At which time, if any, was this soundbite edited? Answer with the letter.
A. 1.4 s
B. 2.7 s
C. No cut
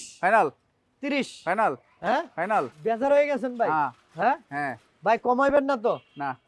B